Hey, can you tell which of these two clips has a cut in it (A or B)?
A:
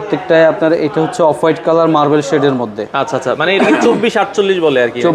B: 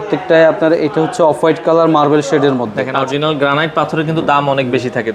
B